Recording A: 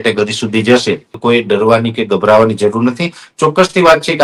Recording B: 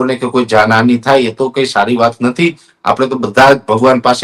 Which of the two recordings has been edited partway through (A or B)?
A